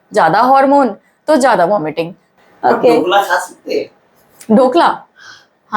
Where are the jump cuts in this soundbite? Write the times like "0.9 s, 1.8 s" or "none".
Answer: 2.3 s